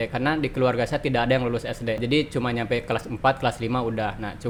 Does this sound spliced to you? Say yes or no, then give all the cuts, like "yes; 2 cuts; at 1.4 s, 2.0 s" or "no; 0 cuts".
no; 0 cuts